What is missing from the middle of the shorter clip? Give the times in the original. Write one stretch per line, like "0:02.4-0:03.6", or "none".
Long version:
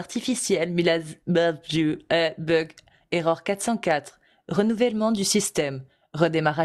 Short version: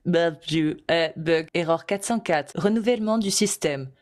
0:02.7-0:03.1
0:04.1-0:04.4

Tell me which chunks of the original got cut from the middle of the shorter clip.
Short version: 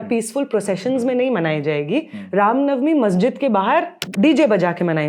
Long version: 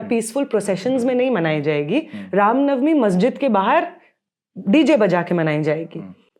0:04.0-0:04.5

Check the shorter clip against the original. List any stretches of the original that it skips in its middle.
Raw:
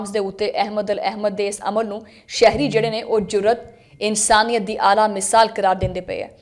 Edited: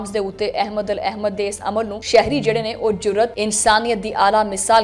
0:02.0-0:02.3
0:03.6-0:04.0

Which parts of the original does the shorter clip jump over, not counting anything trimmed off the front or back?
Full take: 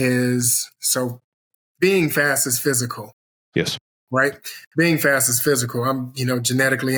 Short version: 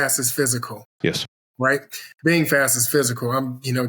0:03.5-0:03.7

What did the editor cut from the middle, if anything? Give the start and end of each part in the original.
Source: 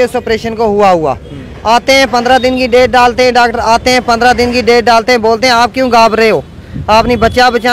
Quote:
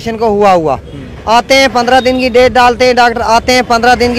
none

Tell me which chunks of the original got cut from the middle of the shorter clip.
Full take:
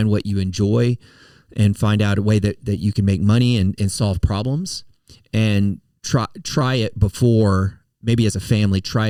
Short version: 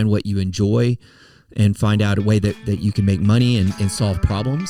none

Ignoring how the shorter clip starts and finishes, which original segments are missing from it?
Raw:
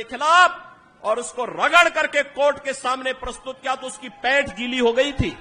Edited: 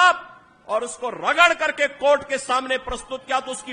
none

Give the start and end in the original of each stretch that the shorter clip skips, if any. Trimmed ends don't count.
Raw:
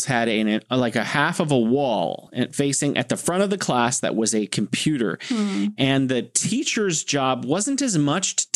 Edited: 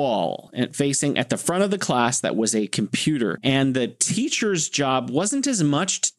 0:05.2-0:05.7

